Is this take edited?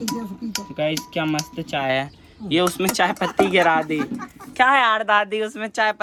no; 0 cuts

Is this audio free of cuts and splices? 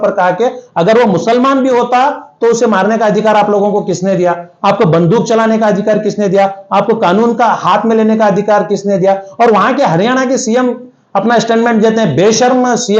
yes; 0 cuts

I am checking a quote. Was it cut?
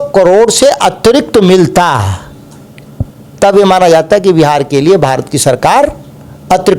no; 0 cuts

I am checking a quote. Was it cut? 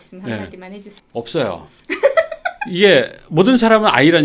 no; 0 cuts

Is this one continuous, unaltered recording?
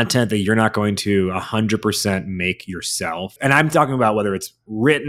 no; 1 cut; at 3.3 s

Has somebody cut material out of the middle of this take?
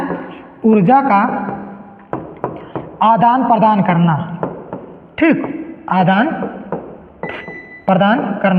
no; 0 cuts

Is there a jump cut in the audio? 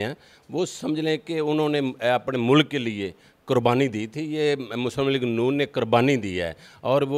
no; 0 cuts

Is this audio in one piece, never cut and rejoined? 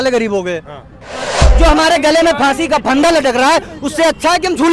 no; 1 cut; at 1.4 s

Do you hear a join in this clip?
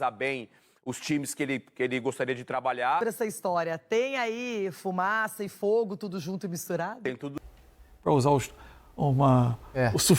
yes; 2 cuts; at 3.0 s, 7.3 s

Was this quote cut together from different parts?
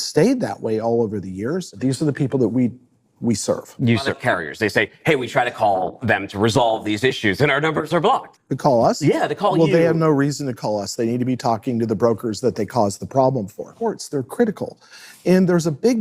yes; 3 cuts; at 1.7 s, 4.2 s, 13.7 s

